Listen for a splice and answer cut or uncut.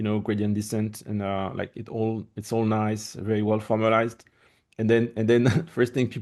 uncut